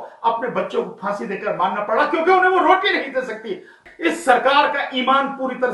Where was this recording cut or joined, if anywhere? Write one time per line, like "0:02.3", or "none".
0:03.8